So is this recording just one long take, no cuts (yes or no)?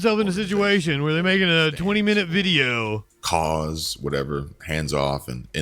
yes